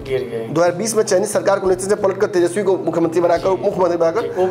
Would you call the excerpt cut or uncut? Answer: uncut